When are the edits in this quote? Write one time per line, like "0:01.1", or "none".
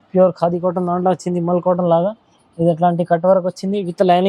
none